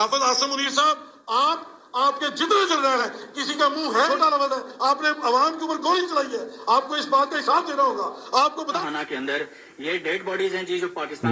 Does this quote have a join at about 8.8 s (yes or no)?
yes